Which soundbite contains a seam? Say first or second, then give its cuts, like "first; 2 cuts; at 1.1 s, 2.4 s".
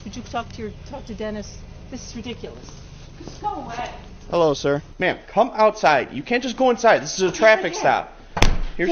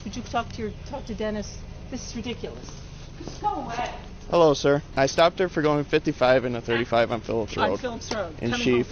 first; 1 cut; at 4.9 s